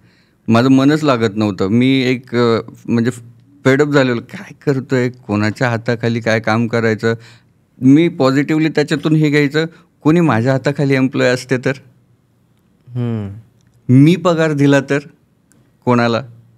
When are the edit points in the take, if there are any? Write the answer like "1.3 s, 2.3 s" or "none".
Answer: none